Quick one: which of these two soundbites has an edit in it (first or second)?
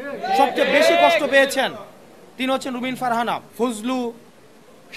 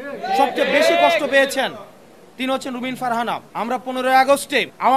first